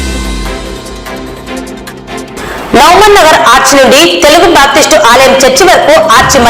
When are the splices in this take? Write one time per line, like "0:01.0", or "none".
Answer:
0:02.1